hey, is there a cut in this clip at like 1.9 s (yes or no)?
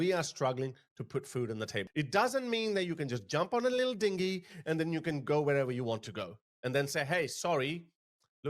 yes